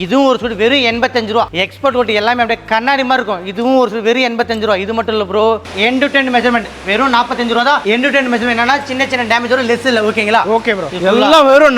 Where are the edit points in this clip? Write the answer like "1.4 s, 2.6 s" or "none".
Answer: 1.5 s, 5.7 s, 10.8 s